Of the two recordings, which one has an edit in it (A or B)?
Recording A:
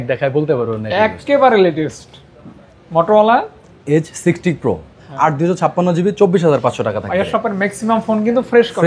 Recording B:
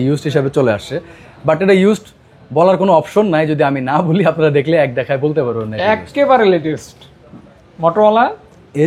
A